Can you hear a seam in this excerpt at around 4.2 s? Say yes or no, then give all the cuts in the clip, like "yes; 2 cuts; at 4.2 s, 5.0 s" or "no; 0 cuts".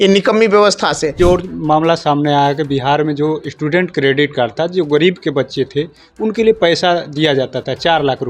no; 1 cut; at 1.1 s